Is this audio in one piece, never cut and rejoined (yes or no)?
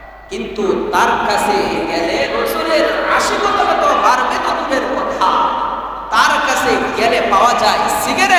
yes